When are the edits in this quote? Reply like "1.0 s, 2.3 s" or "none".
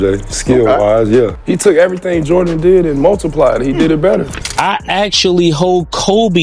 4.4 s